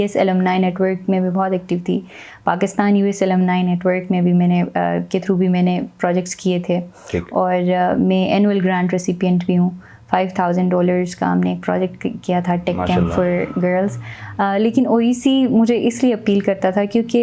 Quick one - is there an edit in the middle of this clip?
no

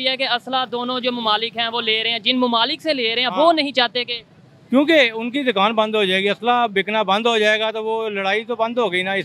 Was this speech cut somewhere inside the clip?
no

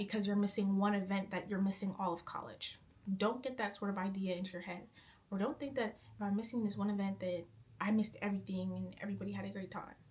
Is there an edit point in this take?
no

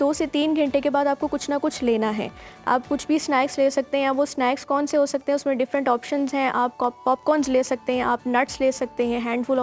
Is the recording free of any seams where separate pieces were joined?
yes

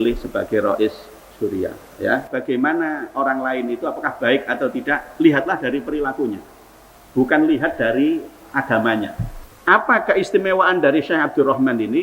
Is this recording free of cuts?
no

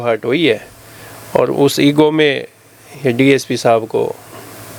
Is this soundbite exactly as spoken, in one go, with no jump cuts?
yes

